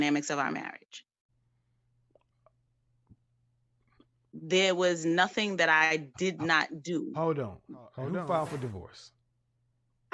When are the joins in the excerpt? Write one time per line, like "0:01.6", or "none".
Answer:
0:08.0

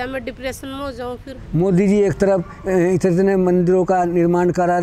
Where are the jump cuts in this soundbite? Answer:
0:01.3

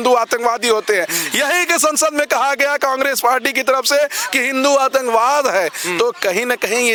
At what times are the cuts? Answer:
none

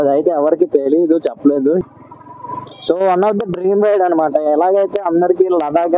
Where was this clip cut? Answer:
0:01.8

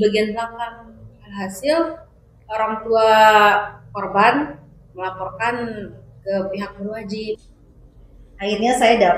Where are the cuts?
0:07.4

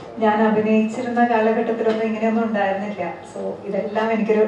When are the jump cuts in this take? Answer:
none

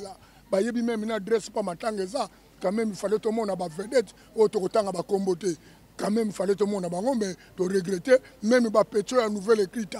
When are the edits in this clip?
none

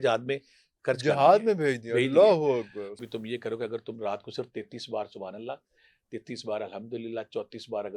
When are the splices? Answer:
0:02.8

